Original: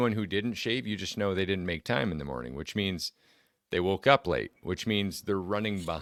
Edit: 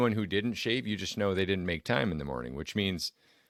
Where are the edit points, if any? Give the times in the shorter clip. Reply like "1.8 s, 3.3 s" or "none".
none